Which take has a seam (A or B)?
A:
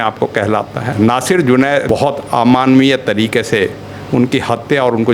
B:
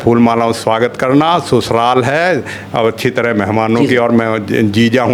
A